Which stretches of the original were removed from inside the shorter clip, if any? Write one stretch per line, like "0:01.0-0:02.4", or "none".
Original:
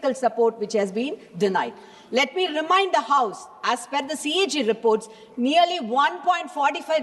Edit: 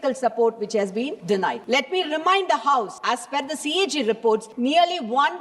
0:01.3-0:01.7
0:03.4-0:03.5
0:05.1-0:05.3